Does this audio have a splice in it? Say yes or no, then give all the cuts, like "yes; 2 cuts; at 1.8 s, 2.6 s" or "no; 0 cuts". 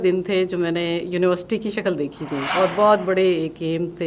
yes; 1 cut; at 2.5 s